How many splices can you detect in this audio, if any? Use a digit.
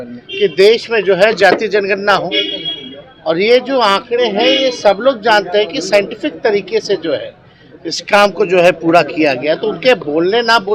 0